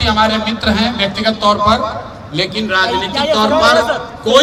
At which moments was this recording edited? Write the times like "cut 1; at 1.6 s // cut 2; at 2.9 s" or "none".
none